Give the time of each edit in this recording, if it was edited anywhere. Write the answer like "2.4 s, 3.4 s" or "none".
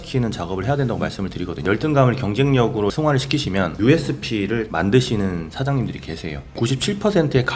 1.6 s, 3.4 s, 4.7 s, 6.4 s